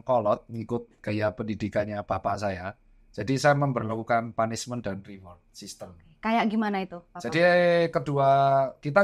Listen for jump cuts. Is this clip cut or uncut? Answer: uncut